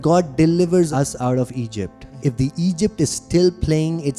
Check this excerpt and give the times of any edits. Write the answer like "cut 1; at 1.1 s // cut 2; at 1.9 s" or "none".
cut 1; at 0.9 s // cut 2; at 2.1 s